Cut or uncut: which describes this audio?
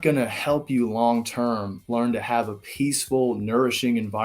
uncut